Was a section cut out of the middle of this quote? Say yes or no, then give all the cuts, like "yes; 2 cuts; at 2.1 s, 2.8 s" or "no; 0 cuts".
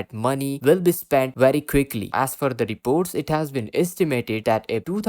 yes; 1 cut; at 2.1 s